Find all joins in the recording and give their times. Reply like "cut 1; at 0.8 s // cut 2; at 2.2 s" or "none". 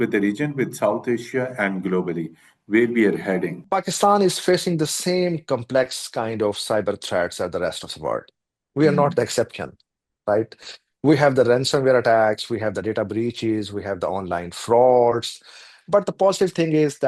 none